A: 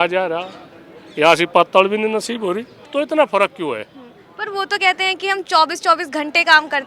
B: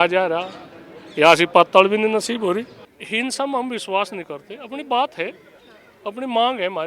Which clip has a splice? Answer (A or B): B